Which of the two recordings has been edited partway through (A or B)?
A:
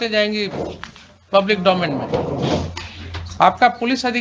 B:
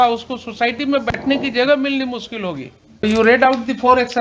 B